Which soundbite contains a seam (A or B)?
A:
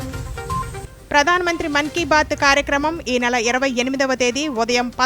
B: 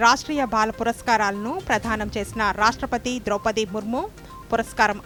A